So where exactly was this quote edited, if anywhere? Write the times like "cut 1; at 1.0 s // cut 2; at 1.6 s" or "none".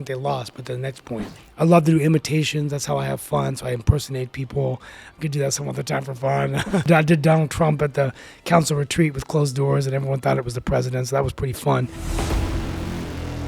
cut 1; at 1.4 s // cut 2; at 6.9 s // cut 3; at 12.0 s